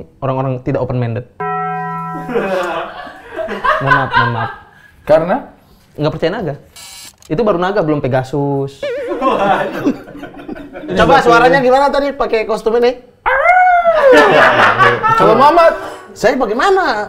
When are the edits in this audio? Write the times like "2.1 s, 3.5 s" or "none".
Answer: 10.9 s